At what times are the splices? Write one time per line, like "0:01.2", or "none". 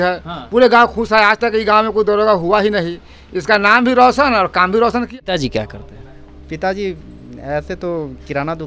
0:05.1

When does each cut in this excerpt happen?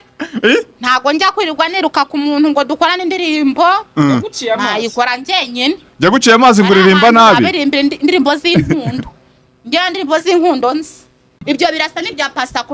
0:11.4

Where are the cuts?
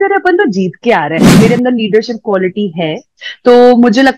0:01.3

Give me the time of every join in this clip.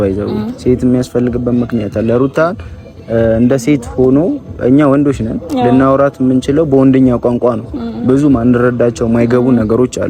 none

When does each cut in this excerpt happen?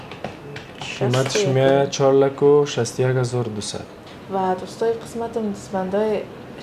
0:04.0

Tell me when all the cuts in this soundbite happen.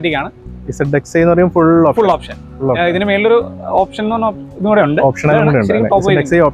none

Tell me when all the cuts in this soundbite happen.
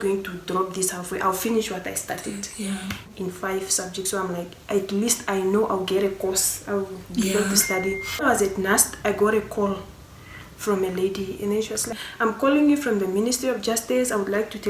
0:03.1
0:08.2
0:12.0

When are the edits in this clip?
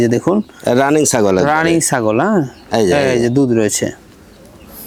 none

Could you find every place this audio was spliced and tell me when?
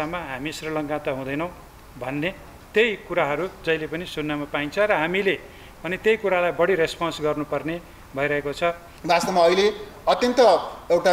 0:08.9

